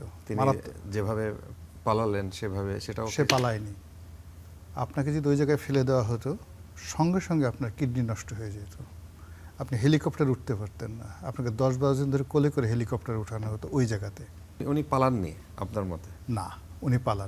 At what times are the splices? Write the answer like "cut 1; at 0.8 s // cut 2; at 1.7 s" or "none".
cut 1; at 14.6 s